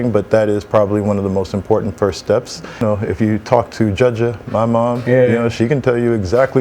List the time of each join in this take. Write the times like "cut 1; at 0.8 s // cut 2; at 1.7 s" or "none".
cut 1; at 2.8 s